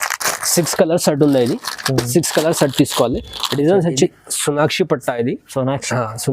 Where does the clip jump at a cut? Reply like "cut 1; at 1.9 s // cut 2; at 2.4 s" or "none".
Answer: cut 1; at 4.1 s